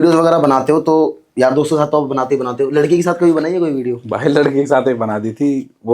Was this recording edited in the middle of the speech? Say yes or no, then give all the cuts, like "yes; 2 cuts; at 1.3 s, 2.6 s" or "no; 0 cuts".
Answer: no; 0 cuts